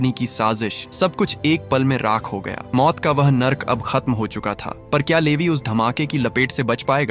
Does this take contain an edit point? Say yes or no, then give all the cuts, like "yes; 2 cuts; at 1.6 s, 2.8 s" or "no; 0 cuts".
no; 0 cuts